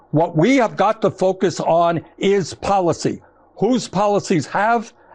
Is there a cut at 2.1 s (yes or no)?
no